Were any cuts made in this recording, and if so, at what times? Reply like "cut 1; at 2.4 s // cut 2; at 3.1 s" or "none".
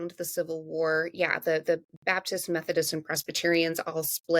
none